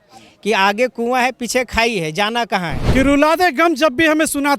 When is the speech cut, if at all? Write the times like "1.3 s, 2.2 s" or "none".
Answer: 2.8 s